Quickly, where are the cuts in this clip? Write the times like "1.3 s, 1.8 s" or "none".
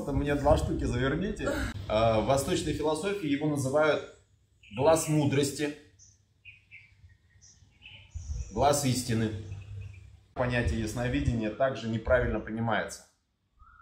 1.7 s, 10.4 s